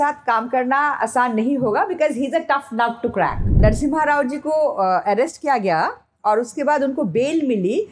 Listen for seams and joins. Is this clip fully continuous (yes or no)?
no